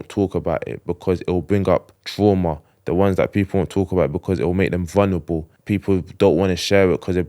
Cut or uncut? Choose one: cut